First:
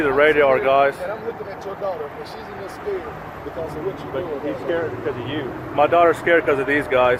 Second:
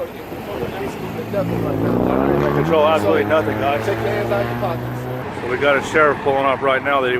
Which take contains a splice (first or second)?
second